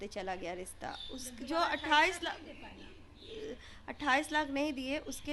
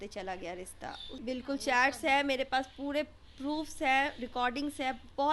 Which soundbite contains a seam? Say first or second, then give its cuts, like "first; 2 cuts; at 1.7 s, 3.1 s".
second; 1 cut; at 1.1 s